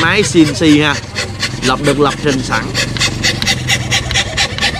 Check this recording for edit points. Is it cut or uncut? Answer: uncut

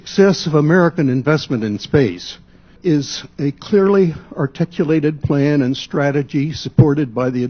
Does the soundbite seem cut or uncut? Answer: cut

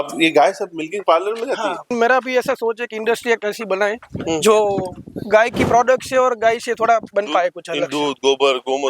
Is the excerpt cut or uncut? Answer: cut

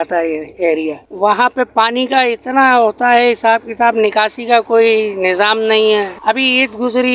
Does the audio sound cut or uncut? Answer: uncut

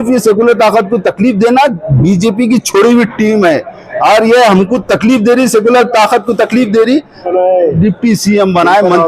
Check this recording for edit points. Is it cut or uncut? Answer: cut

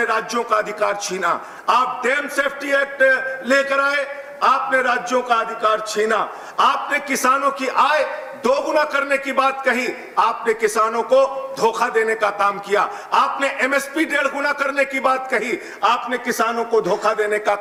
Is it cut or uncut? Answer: uncut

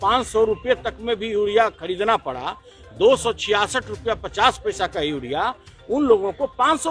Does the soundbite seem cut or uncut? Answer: uncut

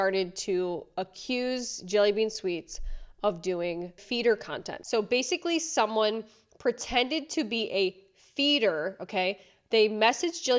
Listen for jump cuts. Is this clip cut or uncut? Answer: cut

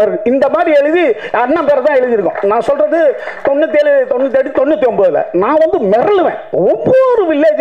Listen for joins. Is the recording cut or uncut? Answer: uncut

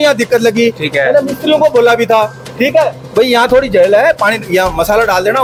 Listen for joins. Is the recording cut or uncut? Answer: uncut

